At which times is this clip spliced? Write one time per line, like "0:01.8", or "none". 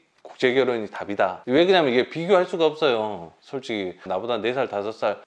none